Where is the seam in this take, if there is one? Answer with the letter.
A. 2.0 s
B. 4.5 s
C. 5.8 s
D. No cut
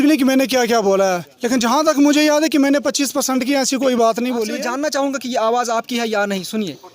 B